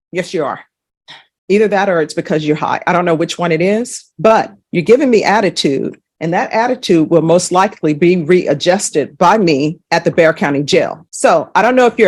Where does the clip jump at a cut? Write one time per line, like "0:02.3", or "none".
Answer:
none